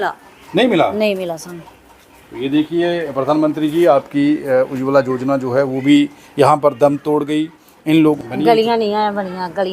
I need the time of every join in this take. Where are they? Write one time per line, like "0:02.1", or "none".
0:08.2